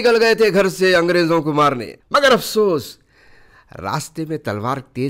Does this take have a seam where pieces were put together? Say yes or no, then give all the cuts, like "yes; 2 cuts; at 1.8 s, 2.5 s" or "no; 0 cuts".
yes; 1 cut; at 1.9 s